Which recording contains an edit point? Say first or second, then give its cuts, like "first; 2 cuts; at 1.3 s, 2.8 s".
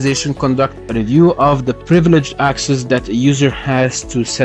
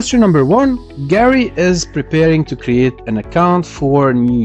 second; 1 cut; at 0.9 s